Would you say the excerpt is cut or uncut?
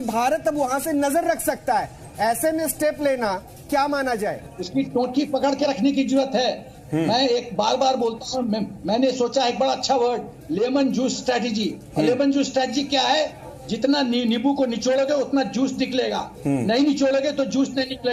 uncut